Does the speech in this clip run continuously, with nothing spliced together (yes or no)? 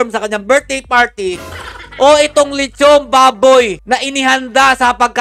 yes